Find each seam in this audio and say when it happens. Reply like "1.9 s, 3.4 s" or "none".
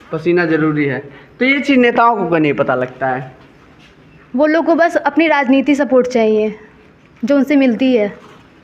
none